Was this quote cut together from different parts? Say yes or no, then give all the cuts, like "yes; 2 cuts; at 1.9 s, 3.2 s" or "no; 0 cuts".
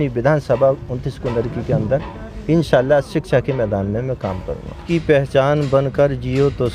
yes; 1 cut; at 4.8 s